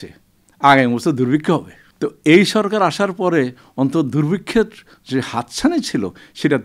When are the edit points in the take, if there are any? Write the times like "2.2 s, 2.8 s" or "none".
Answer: 1.8 s